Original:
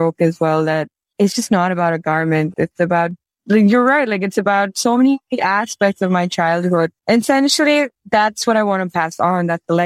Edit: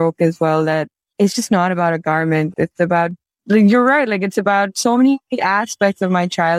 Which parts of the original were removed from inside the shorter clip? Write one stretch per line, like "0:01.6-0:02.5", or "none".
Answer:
none